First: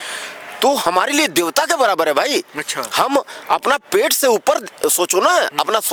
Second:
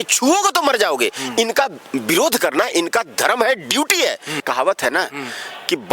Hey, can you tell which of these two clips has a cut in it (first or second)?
second